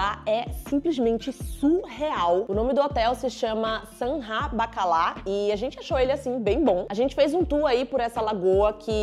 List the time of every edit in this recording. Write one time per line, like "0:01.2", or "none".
0:02.5
0:06.9